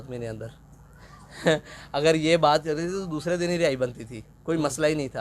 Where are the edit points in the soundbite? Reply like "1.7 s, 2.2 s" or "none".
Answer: none